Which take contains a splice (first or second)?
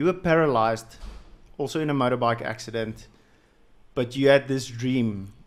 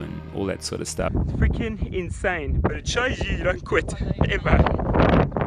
second